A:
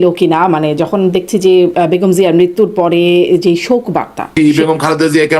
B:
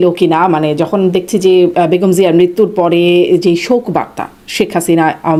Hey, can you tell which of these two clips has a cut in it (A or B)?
A